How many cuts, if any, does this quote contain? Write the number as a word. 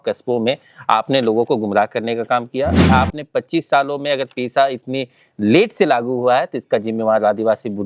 one